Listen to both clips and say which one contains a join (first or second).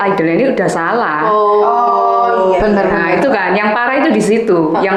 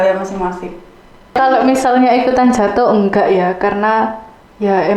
second